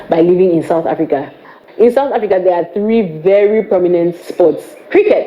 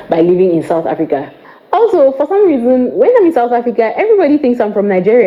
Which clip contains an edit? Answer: first; 1 cut; at 1.5 s

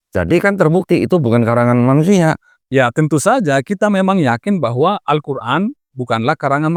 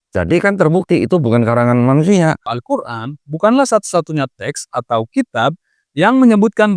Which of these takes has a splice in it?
second; 1 cut; at 2.5 s

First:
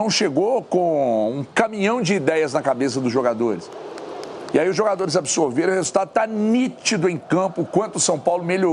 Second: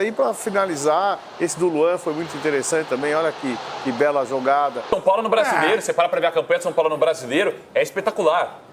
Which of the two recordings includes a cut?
second; 1 cut; at 4.9 s

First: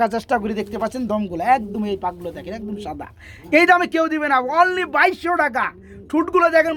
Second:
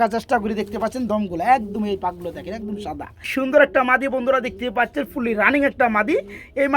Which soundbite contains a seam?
second; 1 cut; at 3.3 s

